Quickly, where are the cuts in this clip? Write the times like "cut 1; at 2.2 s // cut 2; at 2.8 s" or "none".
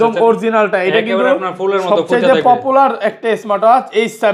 none